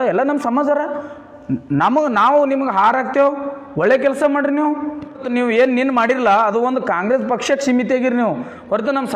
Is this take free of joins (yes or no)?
no